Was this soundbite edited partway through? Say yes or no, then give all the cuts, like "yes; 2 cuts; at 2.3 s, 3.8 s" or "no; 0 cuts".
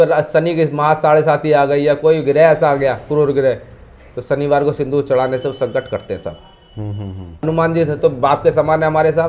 yes; 1 cut; at 7.4 s